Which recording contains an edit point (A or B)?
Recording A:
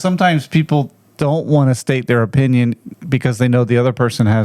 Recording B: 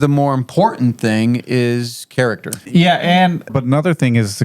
B